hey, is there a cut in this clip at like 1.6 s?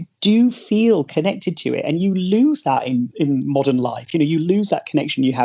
no; 1 cut; at 3.1 s

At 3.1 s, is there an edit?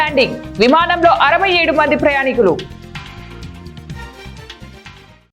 yes; 1 cut; at 3.1 s

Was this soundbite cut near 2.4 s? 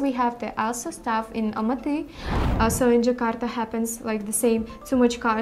yes; 1 cut; at 2.4 s

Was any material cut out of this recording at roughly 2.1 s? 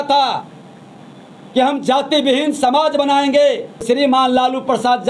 no; 1 cut; at 3.8 s

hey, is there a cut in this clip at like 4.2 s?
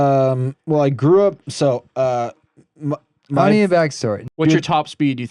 yes; 1 cut; at 4.2 s

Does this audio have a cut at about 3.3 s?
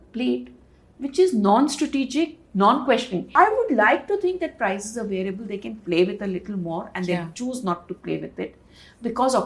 yes; 1 cut; at 3.3 s

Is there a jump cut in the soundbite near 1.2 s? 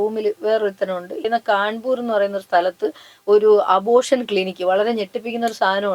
yes; 1 cut; at 1.2 s

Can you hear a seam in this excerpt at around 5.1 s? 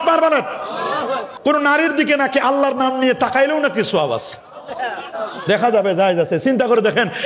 no; 1 cut; at 1.3 s

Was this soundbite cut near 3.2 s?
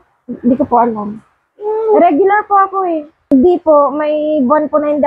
yes; 1 cut; at 3.2 s

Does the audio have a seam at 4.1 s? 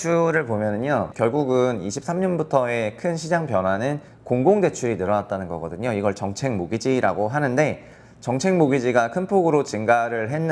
yes; 2 cuts; at 1.1 s, 4.1 s

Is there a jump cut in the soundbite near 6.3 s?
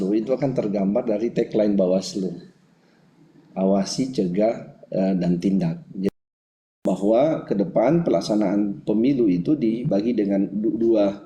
yes; 1 cut; at 6.3 s

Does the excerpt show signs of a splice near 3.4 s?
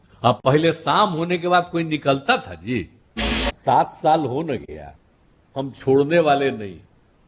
yes; 1 cut; at 3.4 s

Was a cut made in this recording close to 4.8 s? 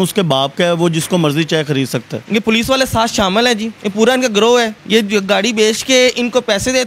yes; 3 cuts; at 2.1 s, 3.8 s, 4.8 s

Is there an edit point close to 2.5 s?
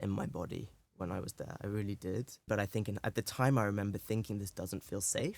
yes; 1 cut; at 2.5 s

